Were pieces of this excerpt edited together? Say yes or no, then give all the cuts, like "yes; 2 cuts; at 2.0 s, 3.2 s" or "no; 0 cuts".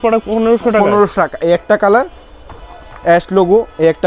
no; 0 cuts